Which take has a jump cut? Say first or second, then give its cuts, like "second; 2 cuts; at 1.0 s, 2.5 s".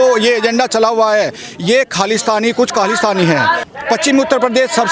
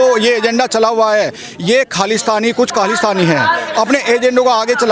first; 1 cut; at 3.7 s